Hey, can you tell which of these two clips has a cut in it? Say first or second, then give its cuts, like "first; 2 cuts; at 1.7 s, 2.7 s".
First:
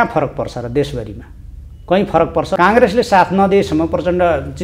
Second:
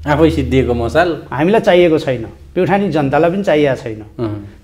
first; 1 cut; at 2.6 s